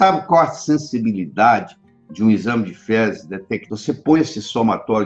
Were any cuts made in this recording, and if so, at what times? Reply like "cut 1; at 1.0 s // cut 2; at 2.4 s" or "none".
cut 1; at 3.6 s